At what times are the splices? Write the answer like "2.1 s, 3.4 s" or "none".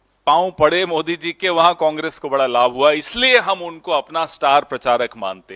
none